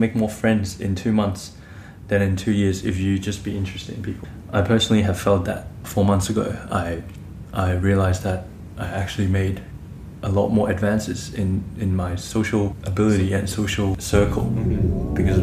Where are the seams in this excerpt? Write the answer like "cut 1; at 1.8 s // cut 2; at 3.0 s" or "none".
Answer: cut 1; at 4.3 s // cut 2; at 5.8 s

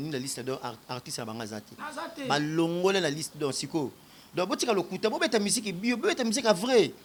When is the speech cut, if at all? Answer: none

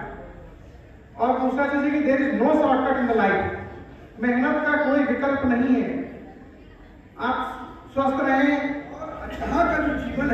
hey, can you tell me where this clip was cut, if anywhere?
cut 1; at 9.2 s

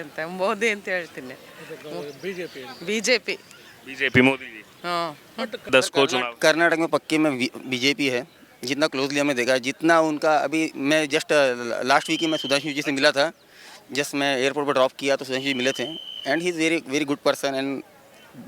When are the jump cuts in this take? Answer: cut 1; at 5.7 s

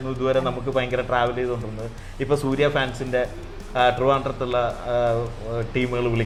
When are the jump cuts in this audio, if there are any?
none

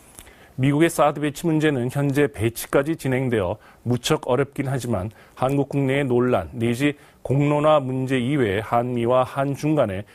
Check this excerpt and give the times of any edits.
none

